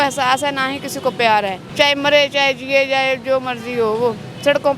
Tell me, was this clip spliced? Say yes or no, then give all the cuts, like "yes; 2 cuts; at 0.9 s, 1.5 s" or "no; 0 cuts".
yes; 1 cut; at 1.6 s